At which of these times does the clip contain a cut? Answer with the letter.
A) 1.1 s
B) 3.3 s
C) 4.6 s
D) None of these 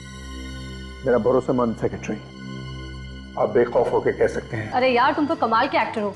C